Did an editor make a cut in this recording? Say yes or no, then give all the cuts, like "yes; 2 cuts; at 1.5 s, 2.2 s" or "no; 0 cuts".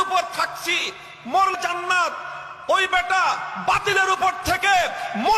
yes; 1 cut; at 1.6 s